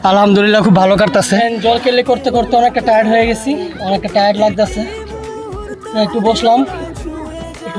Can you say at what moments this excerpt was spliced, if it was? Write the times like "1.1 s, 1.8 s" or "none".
1.4 s